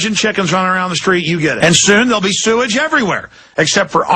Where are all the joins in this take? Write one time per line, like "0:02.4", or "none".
none